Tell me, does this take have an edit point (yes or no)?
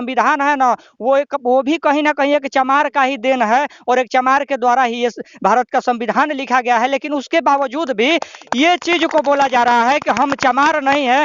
no